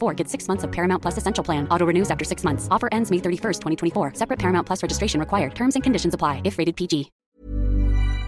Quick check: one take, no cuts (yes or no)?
no